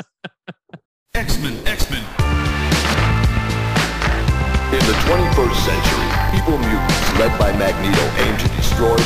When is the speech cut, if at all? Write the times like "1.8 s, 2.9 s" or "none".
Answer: 1.0 s